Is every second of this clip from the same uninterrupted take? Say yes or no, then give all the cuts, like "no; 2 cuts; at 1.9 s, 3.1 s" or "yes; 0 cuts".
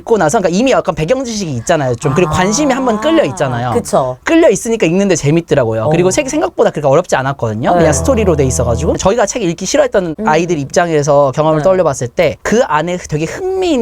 no; 1 cut; at 9.0 s